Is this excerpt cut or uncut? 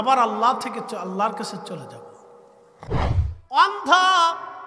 cut